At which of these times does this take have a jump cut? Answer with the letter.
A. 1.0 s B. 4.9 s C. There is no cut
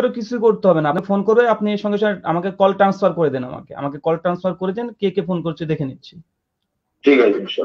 A